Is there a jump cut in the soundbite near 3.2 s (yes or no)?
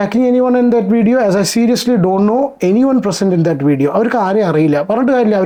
no